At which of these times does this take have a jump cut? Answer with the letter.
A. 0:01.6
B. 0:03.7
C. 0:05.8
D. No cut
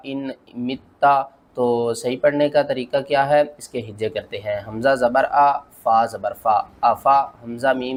D